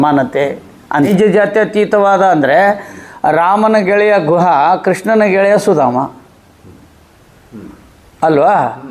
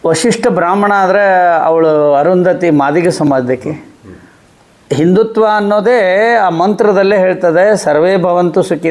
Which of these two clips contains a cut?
first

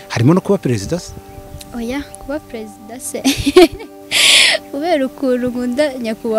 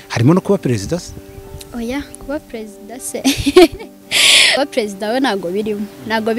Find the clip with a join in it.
second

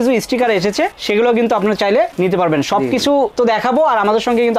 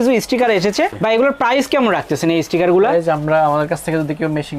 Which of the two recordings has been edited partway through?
second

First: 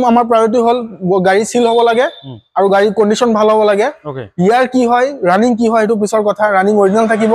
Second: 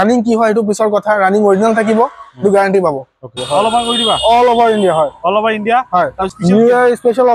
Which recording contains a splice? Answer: second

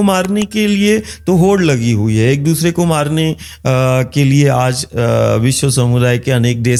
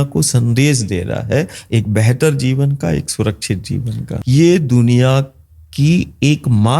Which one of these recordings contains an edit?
second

